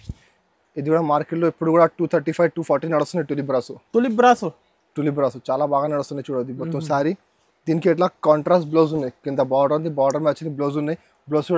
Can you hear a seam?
no; 0 cuts

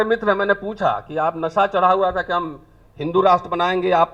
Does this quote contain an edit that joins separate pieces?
no; 0 cuts

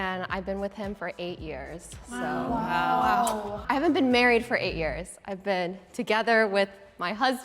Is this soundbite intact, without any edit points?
yes; 0 cuts

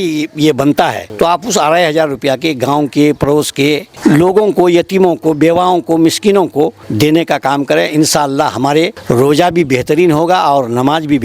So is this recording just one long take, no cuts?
no; 4 cuts; at 1.0 s, 3.9 s, 6.8 s, 9.0 s

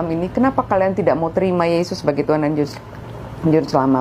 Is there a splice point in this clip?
no; 0 cuts

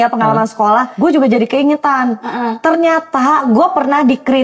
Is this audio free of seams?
no; 2 cuts; at 0.9 s, 3.4 s

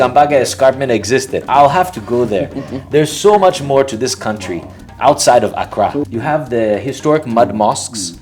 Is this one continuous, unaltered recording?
no; 1 cut; at 6.0 s

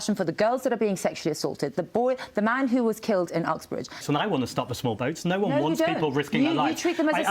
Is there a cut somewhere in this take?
yes; 1 cut; at 4.0 s

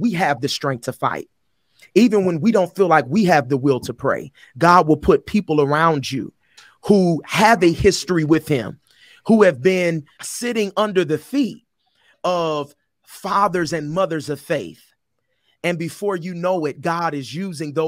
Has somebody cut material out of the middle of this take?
yes; 2 cuts; at 10.1 s, 12.1 s

